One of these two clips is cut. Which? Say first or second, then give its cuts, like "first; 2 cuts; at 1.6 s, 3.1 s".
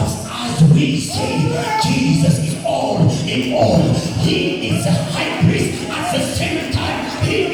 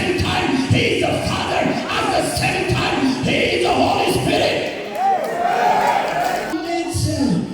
second; 1 cut; at 6.5 s